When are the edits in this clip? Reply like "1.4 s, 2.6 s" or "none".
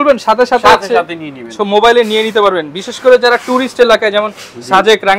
none